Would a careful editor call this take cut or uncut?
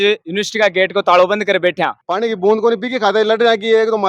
cut